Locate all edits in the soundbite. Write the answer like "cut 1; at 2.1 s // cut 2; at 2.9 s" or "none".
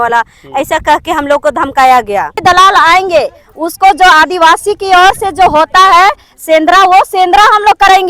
cut 1; at 2.4 s